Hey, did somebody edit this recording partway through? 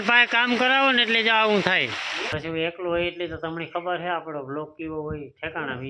yes; 1 cut; at 2.3 s

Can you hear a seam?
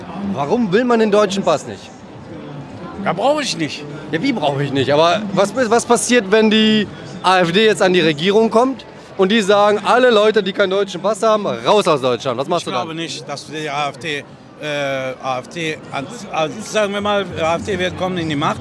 no; 0 cuts

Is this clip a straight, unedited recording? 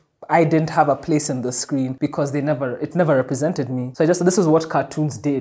no; 2 cuts; at 1.9 s, 3.8 s

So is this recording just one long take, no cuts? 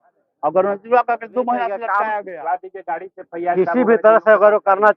no; 1 cut; at 2.0 s

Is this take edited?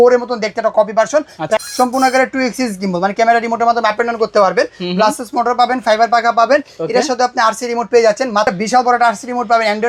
yes; 2 cuts; at 1.6 s, 8.5 s

